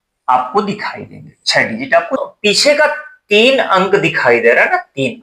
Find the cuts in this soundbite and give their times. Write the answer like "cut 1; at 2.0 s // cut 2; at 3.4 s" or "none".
cut 1; at 2.2 s